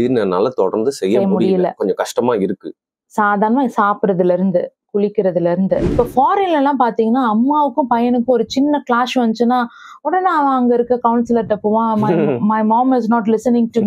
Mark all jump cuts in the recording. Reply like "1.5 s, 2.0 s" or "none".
5.9 s